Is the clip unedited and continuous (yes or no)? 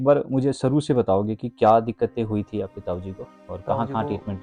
yes